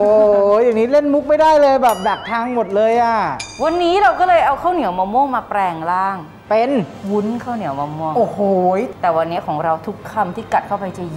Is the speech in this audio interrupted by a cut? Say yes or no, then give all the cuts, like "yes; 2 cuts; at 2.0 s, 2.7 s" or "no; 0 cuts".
yes; 2 cuts; at 3.5 s, 8.9 s